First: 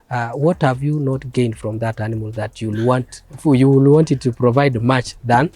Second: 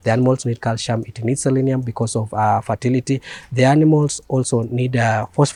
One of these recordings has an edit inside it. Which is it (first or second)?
first